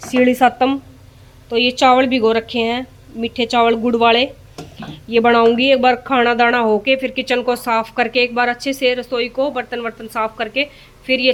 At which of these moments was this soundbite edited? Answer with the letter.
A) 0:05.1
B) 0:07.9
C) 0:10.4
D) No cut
D